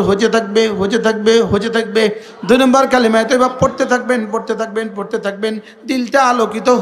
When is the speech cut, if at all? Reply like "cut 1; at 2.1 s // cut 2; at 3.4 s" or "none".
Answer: cut 1; at 2.3 s

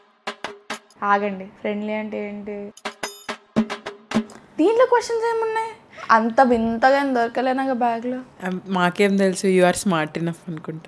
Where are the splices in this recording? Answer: cut 1; at 4.3 s // cut 2; at 8.3 s

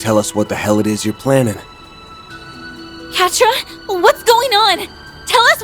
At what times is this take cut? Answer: cut 1; at 1.7 s // cut 2; at 3.1 s

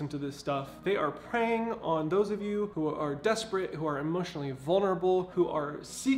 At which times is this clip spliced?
cut 1; at 2.7 s // cut 2; at 5.3 s

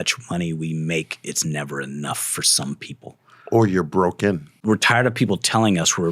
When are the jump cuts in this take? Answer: cut 1; at 4.5 s

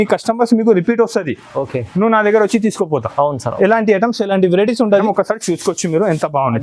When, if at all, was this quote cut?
cut 1; at 5.0 s

